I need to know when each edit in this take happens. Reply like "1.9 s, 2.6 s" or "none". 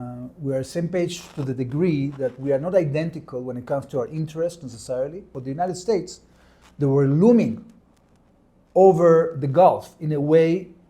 5.3 s